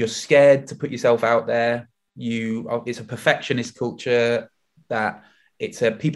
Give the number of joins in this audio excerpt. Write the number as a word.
zero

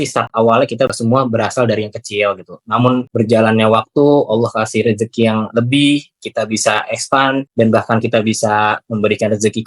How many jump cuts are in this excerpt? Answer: three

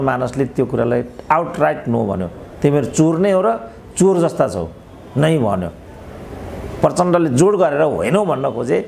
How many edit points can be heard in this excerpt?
zero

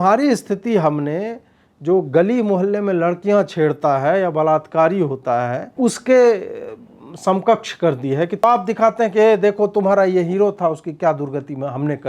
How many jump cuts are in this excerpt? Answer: two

